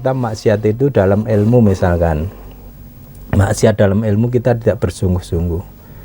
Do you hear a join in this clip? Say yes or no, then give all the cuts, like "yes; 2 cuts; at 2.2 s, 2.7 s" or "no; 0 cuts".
no; 0 cuts